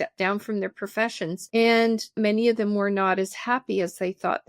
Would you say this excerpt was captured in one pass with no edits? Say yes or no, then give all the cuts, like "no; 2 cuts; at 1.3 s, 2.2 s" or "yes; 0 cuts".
no; 1 cut; at 2.1 s